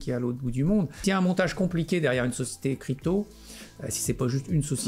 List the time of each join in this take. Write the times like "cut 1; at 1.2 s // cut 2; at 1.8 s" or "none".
cut 1; at 0.9 s